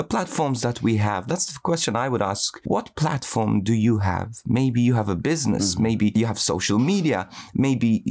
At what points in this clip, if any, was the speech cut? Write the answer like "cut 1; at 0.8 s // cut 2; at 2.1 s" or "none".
cut 1; at 1.3 s // cut 2; at 2.5 s // cut 3; at 6.1 s